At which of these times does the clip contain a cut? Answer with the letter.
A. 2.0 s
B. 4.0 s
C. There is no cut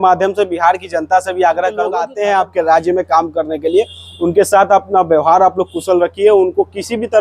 A